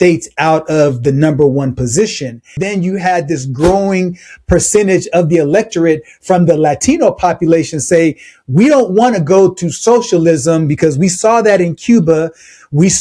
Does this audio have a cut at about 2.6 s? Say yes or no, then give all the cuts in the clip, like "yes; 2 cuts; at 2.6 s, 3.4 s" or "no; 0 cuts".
yes; 1 cut; at 2.6 s